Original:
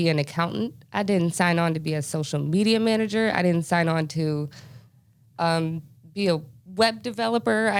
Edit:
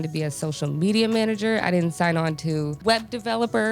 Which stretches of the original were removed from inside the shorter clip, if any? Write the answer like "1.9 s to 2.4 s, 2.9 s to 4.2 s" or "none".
4.5 s to 6.7 s